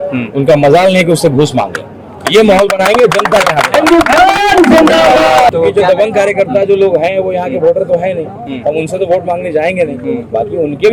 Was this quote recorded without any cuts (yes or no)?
no